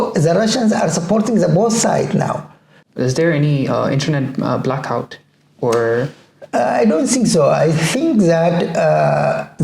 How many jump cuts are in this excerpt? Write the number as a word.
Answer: one